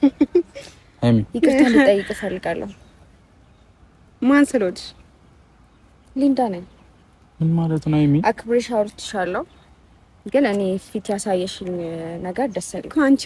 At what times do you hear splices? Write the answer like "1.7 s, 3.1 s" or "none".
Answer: none